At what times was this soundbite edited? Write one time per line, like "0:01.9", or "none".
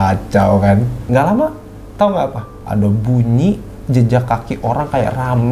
0:01.0

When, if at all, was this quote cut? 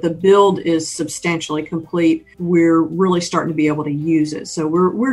0:02.3

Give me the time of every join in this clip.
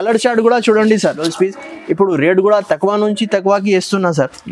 0:01.3

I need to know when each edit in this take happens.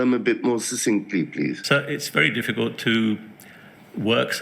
0:01.6

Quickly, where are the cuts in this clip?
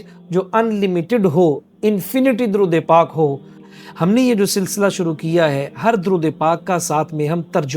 0:03.8

